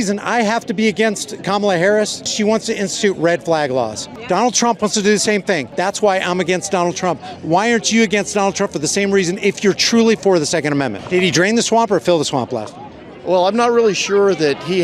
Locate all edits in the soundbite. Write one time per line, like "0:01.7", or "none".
0:02.2
0:04.1
0:05.7
0:11.0

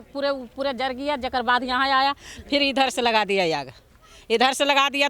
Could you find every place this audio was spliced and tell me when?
none

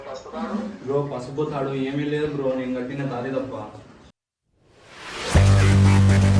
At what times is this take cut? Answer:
none

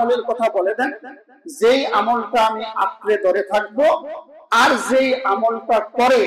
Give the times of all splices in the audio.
none

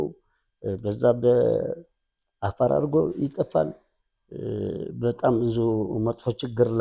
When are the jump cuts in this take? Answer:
none

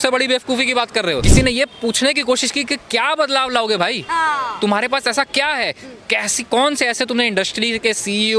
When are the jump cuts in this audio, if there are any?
0:01.3

